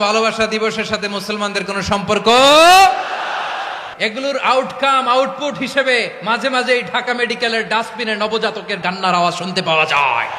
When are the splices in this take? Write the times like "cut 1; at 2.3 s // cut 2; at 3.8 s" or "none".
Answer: cut 1; at 3.8 s // cut 2; at 8.8 s